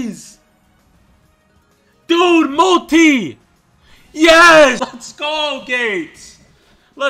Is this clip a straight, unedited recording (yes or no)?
no